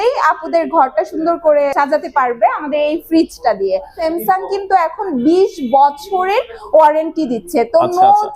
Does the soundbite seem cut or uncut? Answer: cut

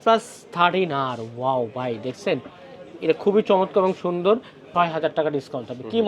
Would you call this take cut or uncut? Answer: cut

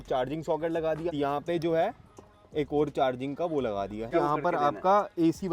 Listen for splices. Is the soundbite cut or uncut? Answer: cut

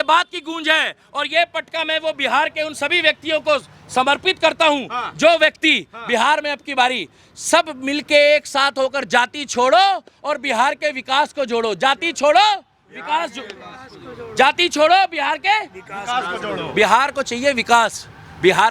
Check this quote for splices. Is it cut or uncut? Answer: uncut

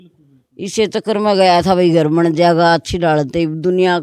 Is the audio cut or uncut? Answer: uncut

